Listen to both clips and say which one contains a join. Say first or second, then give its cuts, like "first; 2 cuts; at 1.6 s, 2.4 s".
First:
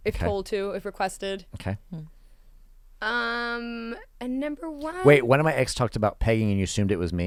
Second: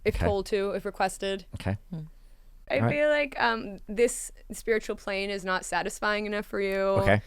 second; 1 cut; at 2.6 s